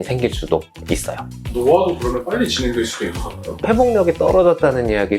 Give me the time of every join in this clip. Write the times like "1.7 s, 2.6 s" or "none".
3.6 s